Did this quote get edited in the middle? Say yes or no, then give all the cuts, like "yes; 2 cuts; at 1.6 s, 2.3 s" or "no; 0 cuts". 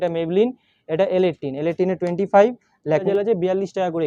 yes; 1 cut; at 3.0 s